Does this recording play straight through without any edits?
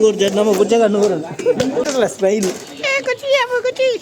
no; 1 cut; at 2.0 s

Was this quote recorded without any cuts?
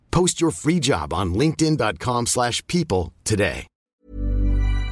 no; 1 cut; at 3.9 s

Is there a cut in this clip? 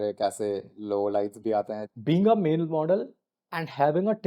yes; 1 cut; at 1.9 s

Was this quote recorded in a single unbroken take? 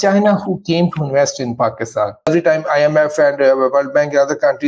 no; 1 cut; at 2.3 s

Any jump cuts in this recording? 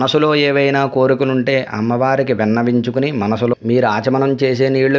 yes; 1 cut; at 3.6 s

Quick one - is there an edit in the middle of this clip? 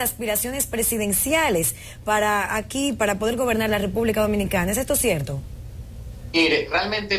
yes; 1 cut; at 5.1 s

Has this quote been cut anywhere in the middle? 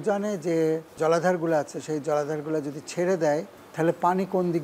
yes; 2 cuts; at 0.9 s, 3.6 s

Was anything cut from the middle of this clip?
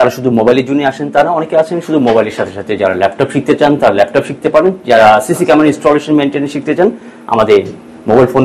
no; 0 cuts

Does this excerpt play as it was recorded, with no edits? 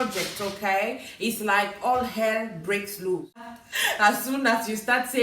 no; 1 cut; at 3.5 s

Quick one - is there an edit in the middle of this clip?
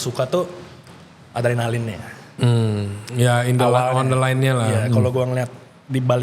no; 0 cuts

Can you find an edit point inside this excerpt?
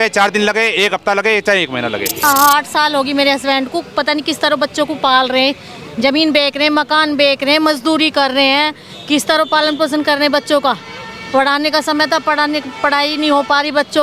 yes; 1 cut; at 2.2 s

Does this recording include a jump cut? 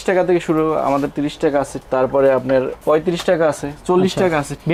no; 0 cuts

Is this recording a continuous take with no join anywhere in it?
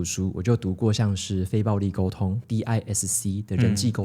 no; 1 cut; at 2.4 s

